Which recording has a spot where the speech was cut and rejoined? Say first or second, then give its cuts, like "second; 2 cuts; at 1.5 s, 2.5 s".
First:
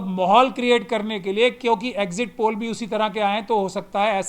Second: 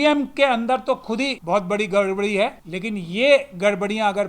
second; 2 cuts; at 1.4 s, 2.7 s